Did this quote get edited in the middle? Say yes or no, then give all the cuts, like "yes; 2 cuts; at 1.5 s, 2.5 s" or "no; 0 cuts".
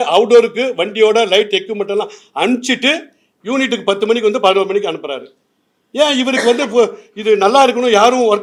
no; 0 cuts